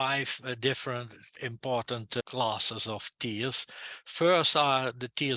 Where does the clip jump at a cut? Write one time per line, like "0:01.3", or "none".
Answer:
0:01.3
0:02.2